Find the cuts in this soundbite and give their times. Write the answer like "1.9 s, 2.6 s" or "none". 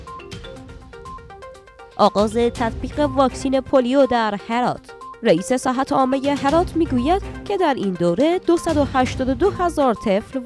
1.1 s